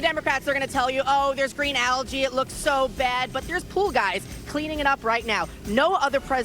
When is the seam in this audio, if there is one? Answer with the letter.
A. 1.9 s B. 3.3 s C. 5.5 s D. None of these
B